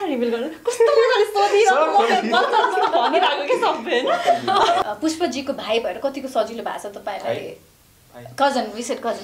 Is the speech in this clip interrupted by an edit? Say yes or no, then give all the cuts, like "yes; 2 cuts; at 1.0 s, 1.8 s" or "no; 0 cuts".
yes; 1 cut; at 4.8 s